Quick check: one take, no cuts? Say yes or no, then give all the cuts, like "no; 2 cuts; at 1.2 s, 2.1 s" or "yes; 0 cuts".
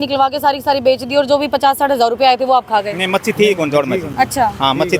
yes; 0 cuts